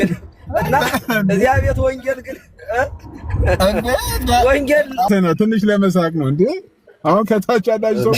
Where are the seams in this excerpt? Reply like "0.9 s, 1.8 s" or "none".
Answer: 5.1 s